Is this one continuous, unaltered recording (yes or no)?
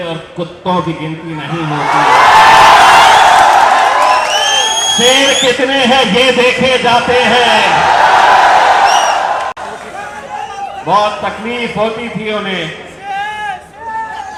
yes